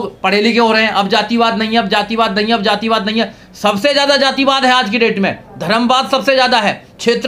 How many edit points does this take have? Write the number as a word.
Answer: zero